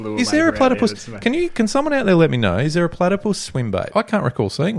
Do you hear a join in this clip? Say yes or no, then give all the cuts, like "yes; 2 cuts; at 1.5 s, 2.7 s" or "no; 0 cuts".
yes; 1 cut; at 3.9 s